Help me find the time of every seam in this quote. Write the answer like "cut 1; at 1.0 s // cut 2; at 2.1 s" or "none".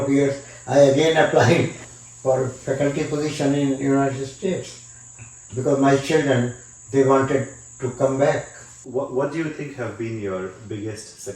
cut 1; at 1.9 s // cut 2; at 8.8 s